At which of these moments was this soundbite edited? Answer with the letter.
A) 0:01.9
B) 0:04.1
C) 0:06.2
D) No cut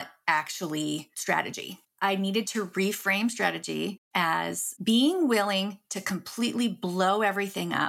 A